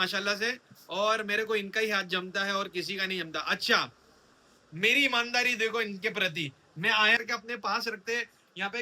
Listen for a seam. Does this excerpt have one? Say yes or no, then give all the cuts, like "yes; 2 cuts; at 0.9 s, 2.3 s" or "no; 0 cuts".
yes; 1 cut; at 7.2 s